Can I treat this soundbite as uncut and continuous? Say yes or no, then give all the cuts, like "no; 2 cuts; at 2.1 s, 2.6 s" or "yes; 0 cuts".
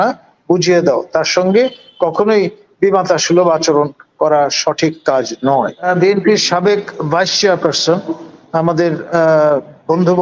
no; 1 cut; at 5.8 s